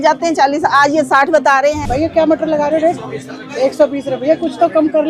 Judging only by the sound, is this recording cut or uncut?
cut